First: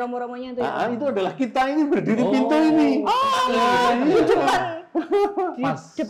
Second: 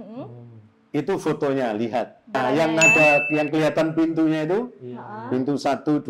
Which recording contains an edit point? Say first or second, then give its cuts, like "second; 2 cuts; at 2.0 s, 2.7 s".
second; 1 cut; at 2.4 s